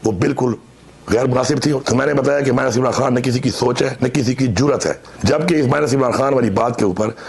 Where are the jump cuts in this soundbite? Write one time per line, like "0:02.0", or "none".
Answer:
0:01.8
0:05.1